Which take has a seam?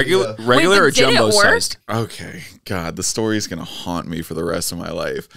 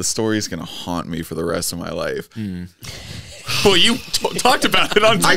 first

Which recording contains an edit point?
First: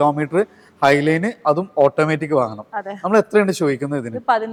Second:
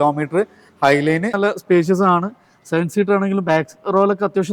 second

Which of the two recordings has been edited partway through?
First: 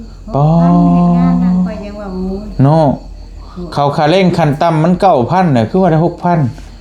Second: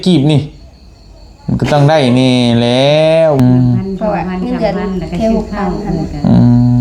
second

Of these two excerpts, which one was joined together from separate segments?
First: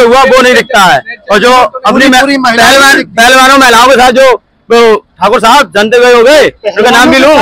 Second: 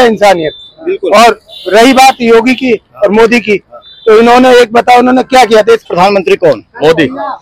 second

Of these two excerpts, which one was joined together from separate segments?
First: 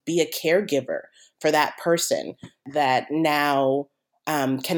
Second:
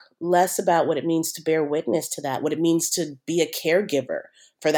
first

